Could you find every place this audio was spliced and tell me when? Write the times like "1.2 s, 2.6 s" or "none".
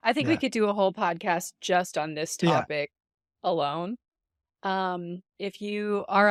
none